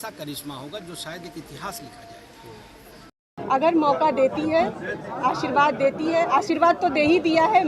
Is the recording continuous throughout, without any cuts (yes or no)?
no